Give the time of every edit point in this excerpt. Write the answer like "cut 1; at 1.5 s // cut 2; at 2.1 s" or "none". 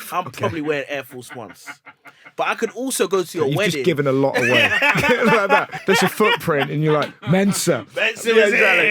cut 1; at 5.8 s